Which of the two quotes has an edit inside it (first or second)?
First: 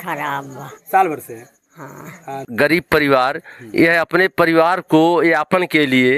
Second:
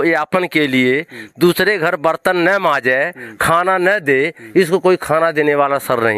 first